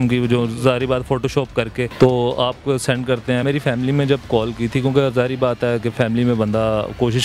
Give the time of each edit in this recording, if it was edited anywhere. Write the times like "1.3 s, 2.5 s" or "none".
1.9 s, 3.4 s